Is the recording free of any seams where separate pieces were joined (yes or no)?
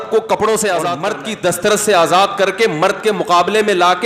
no